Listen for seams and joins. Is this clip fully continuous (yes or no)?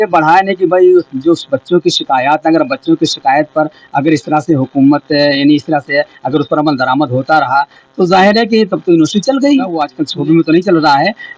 no